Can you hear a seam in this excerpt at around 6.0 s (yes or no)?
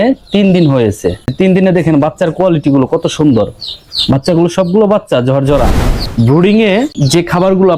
yes